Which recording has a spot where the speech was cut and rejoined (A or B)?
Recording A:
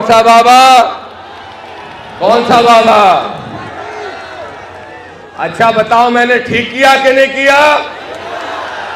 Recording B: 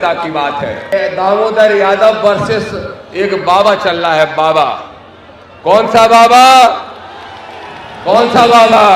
B